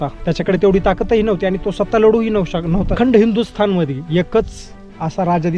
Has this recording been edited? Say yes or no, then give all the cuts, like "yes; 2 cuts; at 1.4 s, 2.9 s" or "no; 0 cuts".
yes; 1 cut; at 2.9 s